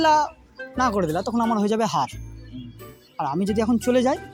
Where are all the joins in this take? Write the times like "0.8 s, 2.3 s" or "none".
none